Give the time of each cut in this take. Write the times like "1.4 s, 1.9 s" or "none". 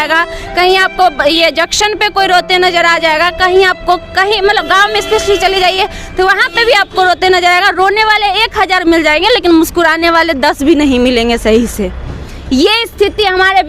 none